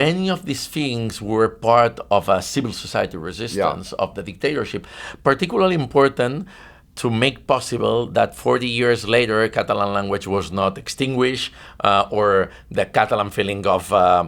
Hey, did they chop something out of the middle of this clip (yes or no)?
no